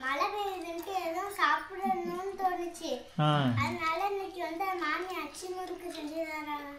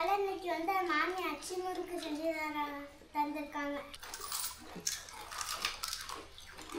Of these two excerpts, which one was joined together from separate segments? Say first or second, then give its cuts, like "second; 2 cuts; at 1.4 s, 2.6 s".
second; 1 cut; at 3.9 s